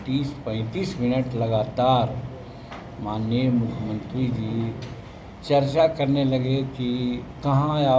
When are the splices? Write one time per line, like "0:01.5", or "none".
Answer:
none